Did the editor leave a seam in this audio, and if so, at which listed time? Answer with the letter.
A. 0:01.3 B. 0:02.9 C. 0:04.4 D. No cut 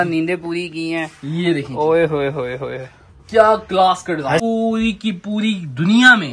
C